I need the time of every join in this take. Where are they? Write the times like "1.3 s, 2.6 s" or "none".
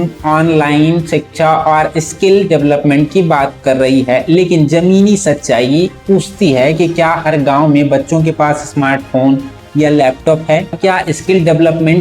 10.8 s